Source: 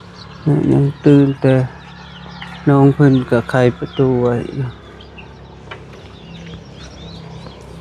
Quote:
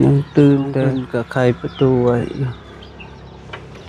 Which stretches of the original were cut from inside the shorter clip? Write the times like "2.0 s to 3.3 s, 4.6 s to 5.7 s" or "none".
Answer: 1.7 s to 3.2 s